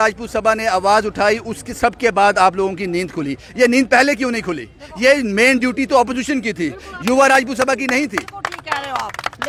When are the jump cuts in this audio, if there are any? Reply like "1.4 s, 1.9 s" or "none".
none